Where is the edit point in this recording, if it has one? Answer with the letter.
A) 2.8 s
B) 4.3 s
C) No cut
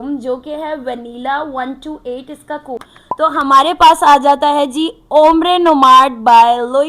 A